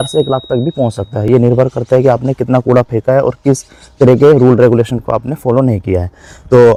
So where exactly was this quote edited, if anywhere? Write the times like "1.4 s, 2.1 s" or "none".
none